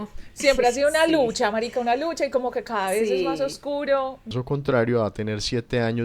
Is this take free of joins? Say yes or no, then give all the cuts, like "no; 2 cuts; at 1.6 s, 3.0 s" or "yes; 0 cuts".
no; 1 cut; at 4.3 s